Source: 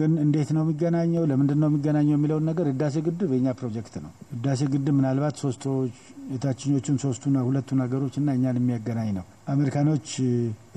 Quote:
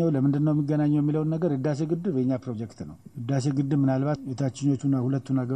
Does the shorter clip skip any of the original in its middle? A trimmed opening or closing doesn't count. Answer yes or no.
yes